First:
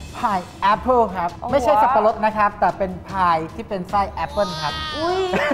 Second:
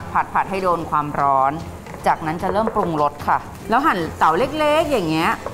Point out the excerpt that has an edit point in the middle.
second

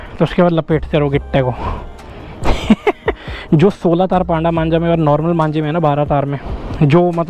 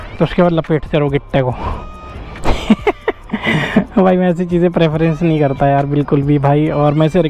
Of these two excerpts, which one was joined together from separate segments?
first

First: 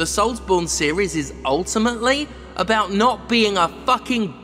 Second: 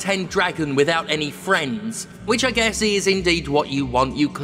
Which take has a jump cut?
second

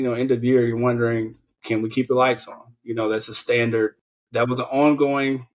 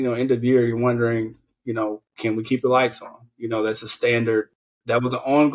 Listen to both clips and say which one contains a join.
first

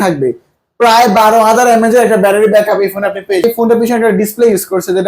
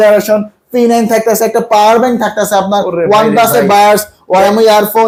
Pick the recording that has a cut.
first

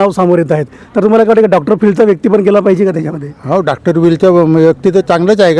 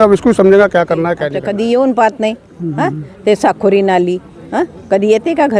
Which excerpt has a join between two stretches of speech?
second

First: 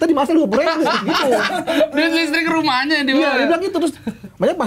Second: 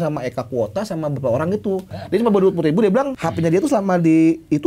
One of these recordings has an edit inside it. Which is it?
second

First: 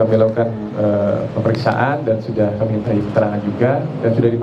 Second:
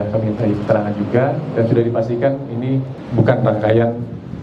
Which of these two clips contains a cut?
second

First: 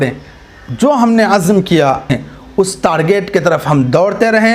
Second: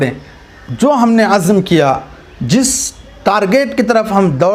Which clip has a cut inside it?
first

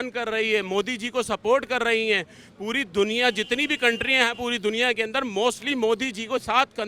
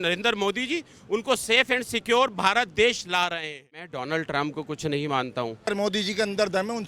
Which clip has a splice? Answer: second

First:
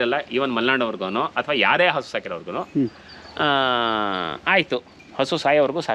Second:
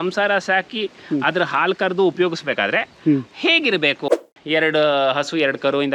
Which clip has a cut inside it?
second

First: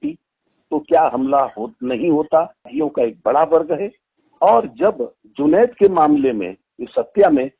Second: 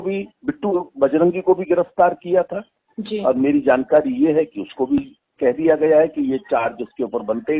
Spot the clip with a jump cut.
first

